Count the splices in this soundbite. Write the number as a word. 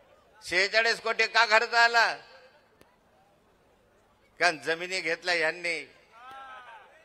zero